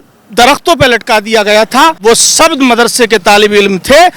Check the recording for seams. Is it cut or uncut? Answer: cut